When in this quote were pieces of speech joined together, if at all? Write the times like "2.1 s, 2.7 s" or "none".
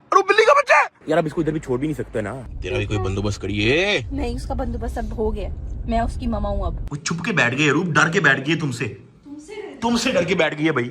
1.0 s, 2.3 s, 6.9 s